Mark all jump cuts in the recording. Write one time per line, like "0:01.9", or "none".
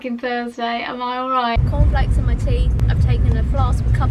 0:01.6
0:02.8